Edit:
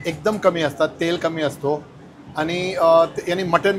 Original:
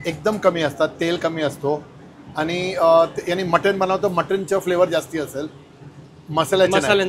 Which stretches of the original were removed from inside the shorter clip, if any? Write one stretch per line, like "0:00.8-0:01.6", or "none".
none